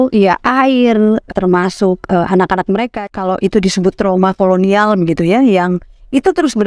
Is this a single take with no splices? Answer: no; 2 cuts; at 1.3 s, 3.0 s

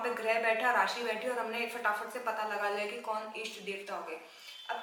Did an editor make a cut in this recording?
no; 0 cuts

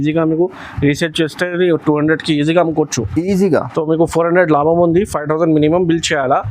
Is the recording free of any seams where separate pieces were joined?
yes; 0 cuts

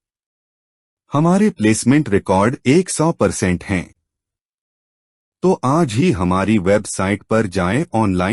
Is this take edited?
no; 0 cuts

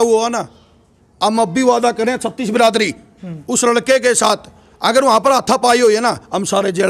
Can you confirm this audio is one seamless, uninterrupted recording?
yes; 0 cuts

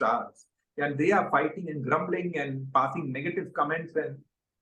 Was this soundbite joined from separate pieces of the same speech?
no; 0 cuts

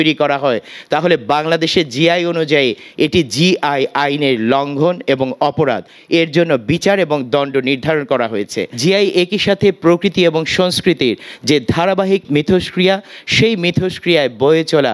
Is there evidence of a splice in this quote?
yes; 2 cuts; at 8.6 s, 12.2 s

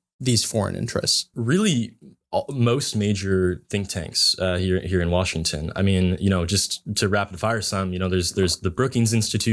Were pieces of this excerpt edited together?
yes; 1 cut; at 1.3 s

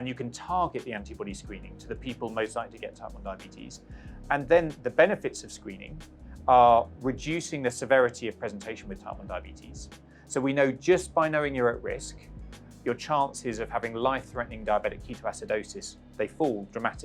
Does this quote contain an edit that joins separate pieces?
no; 0 cuts

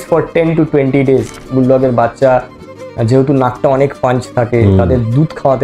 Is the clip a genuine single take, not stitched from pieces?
no; 1 cut; at 1.4 s

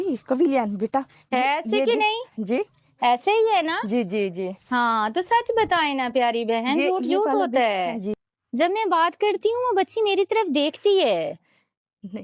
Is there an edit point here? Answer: yes; 1 cut; at 8.2 s

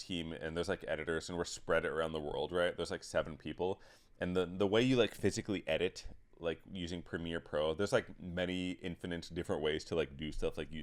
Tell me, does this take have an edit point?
no; 0 cuts

